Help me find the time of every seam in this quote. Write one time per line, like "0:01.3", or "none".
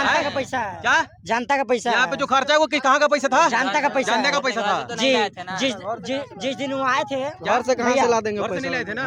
none